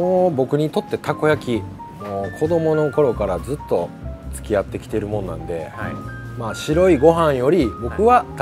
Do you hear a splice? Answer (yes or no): no